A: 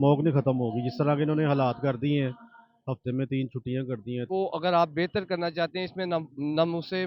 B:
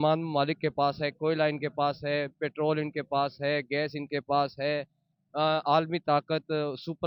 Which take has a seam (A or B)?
A